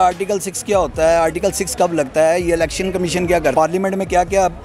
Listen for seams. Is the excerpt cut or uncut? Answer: cut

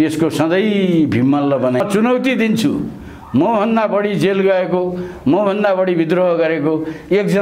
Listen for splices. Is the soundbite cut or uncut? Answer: cut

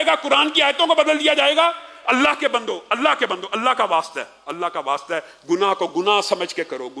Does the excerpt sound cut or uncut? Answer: uncut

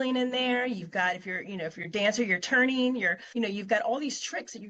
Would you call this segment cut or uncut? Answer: cut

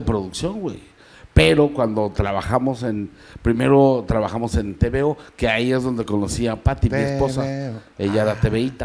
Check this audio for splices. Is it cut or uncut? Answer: uncut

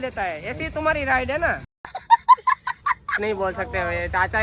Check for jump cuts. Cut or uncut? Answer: cut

